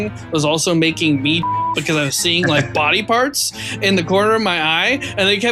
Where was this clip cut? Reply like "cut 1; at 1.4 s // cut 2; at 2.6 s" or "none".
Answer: none